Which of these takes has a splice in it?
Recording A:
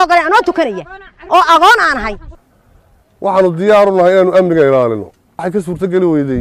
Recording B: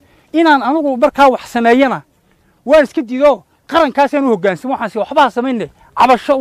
A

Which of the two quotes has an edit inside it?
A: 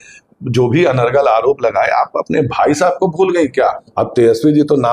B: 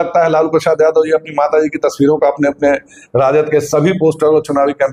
A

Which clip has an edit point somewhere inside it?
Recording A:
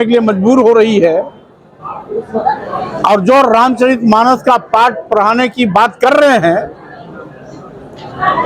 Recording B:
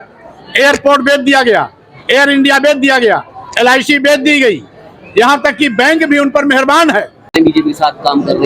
B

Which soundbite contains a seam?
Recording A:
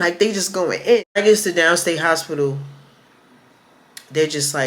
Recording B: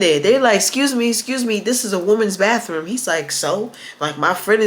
A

